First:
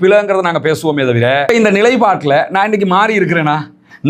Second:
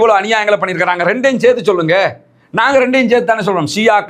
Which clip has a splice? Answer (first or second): first